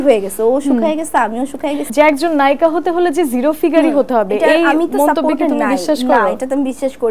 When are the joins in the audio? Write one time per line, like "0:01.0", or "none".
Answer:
0:01.8